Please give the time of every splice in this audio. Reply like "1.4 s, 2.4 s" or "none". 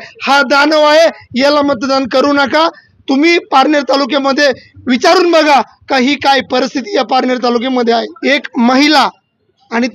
8.1 s